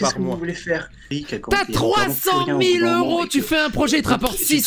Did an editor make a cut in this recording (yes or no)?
yes